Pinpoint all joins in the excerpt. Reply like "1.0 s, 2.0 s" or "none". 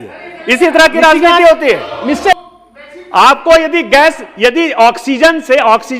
2.3 s